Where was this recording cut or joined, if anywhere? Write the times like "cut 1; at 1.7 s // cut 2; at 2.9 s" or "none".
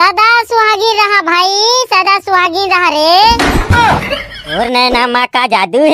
cut 1; at 4.4 s